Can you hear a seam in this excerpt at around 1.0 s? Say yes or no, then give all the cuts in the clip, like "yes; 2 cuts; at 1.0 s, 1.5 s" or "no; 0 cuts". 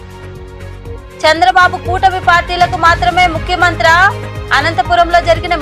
yes; 1 cut; at 1.0 s